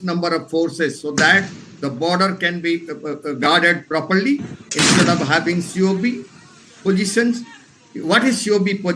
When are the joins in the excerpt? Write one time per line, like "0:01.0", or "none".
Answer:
none